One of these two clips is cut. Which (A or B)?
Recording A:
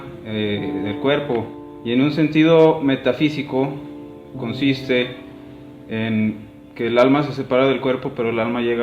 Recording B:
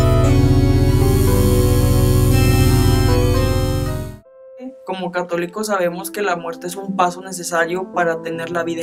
A